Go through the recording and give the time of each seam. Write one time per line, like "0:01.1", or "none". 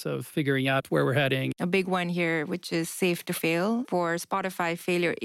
0:01.5
0:03.9